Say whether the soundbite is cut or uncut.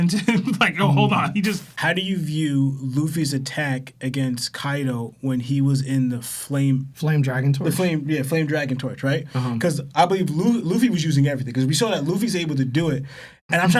cut